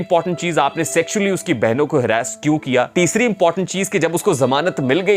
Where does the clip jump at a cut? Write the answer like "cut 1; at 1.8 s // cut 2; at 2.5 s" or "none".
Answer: cut 1; at 2.9 s